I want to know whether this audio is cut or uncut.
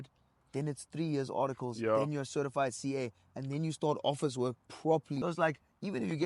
cut